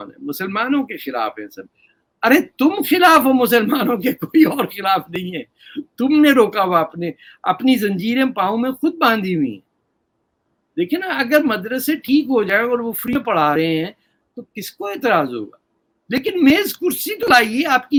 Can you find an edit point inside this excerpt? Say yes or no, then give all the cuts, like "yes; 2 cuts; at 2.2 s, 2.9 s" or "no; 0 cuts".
no; 0 cuts